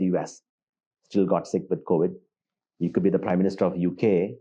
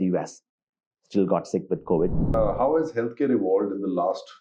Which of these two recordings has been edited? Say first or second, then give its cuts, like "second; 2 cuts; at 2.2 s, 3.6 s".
second; 1 cut; at 2.2 s